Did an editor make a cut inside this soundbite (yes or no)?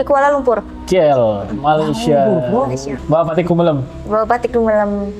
yes